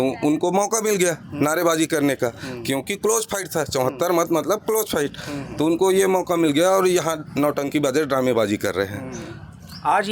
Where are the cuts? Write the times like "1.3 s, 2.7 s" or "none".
none